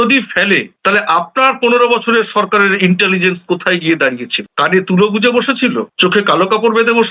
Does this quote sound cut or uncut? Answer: uncut